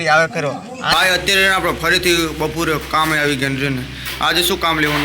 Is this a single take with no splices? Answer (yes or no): no